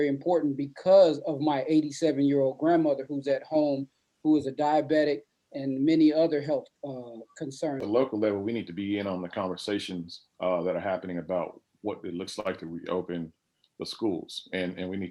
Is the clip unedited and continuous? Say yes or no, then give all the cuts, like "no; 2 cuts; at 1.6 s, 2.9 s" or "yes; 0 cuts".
no; 1 cut; at 7.7 s